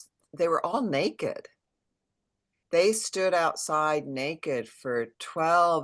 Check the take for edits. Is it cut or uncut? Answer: uncut